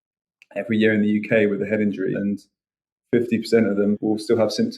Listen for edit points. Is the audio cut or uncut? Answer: cut